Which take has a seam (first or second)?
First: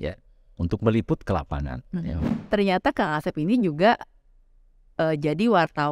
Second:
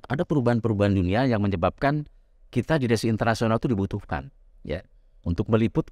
first